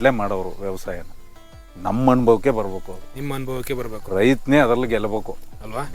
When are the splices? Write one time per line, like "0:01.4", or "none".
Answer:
none